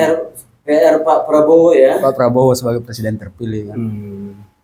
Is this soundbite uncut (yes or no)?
yes